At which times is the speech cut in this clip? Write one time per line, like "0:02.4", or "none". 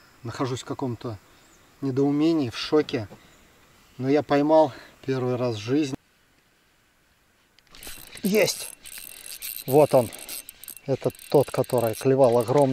0:05.9